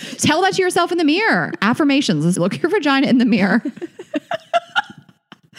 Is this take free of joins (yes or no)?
no